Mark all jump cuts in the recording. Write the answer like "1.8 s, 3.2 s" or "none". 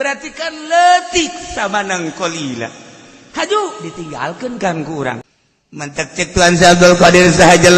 5.2 s